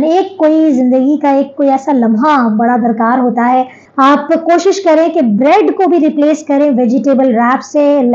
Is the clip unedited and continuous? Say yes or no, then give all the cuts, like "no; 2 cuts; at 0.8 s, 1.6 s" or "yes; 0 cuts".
no; 1 cut; at 3.8 s